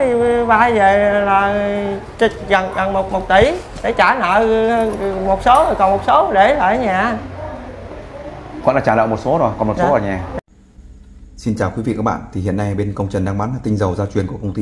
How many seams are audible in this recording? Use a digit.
1